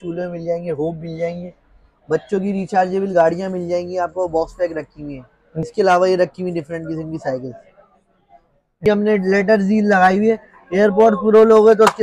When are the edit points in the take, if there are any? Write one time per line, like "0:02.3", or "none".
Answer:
0:05.6
0:08.9